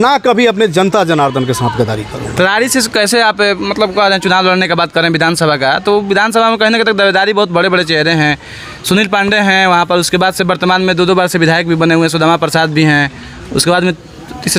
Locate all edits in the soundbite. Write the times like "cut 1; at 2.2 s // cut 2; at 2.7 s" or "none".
none